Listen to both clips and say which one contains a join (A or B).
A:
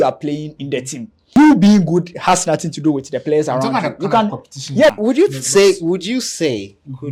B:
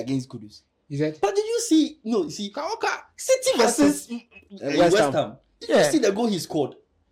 A